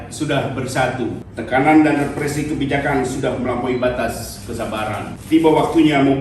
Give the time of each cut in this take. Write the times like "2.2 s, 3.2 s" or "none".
1.3 s, 5.1 s